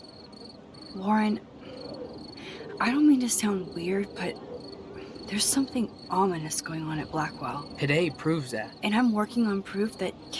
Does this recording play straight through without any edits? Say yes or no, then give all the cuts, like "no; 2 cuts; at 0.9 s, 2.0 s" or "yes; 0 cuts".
no; 1 cut; at 0.9 s